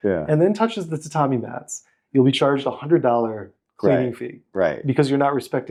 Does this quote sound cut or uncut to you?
uncut